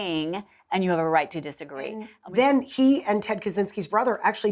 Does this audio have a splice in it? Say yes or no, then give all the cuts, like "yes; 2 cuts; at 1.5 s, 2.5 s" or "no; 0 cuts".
yes; 1 cut; at 2.1 s